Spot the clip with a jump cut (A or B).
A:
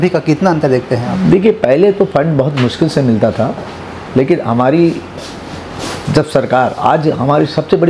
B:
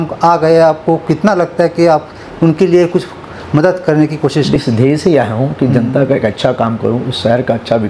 B